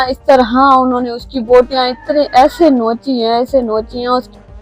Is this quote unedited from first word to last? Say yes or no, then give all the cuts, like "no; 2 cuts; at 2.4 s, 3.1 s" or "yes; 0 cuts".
yes; 0 cuts